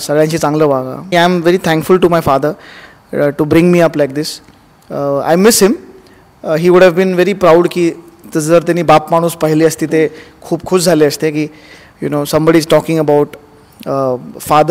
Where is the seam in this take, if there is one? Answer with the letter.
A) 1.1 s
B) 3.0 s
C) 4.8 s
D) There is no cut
A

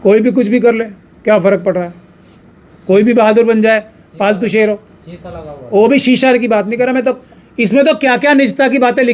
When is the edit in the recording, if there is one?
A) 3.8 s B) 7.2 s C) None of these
B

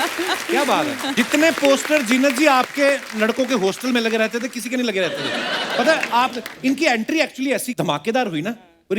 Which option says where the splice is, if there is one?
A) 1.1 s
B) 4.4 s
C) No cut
A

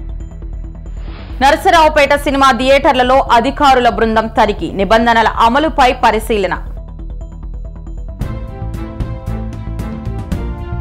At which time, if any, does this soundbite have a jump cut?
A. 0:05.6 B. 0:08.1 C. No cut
B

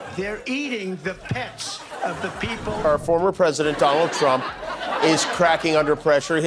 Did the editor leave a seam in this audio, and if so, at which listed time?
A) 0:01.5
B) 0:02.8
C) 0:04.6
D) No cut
B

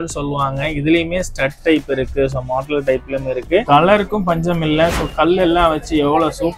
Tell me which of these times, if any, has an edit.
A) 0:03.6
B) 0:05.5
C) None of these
A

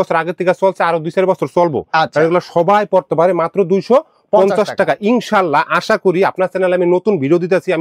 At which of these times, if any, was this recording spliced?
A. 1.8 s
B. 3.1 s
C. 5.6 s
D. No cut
D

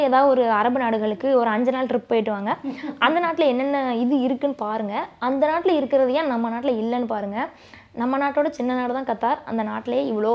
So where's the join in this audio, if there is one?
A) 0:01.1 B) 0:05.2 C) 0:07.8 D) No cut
D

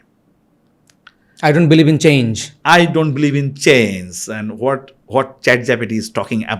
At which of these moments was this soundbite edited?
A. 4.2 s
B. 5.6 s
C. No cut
C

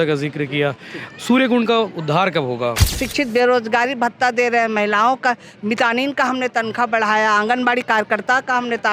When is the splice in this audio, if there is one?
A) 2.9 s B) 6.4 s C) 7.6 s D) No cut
A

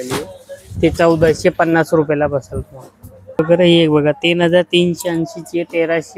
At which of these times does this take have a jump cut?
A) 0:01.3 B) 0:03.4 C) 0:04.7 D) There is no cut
B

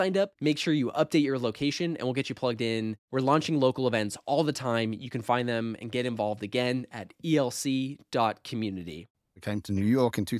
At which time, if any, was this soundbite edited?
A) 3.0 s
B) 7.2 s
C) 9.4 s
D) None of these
C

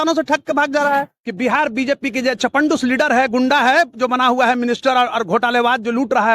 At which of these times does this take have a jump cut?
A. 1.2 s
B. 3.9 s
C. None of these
A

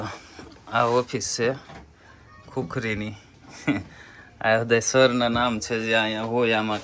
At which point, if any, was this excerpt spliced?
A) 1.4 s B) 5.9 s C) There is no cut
C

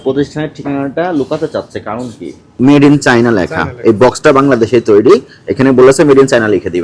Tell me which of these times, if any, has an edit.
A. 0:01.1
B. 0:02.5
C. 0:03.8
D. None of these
B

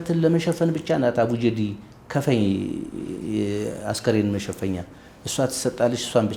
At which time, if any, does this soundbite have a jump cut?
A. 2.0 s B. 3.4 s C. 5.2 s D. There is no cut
D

